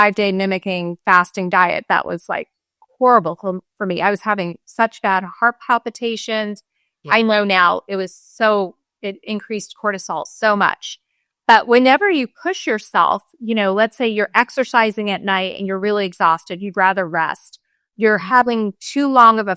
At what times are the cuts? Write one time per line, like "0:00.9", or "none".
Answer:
none